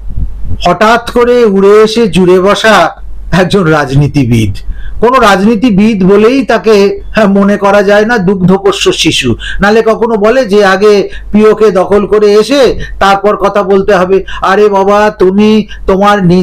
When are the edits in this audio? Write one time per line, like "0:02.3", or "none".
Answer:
none

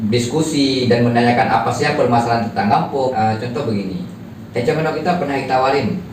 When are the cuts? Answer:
0:03.1

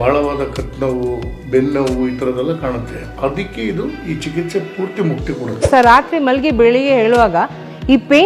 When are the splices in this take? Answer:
0:05.7

